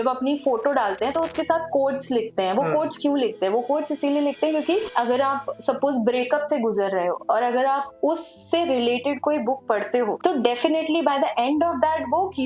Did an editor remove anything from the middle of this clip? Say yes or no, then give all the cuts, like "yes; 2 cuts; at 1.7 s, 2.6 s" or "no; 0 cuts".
yes; 1 cut; at 4.9 s